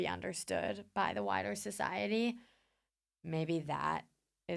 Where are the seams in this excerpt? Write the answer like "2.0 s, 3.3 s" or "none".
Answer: none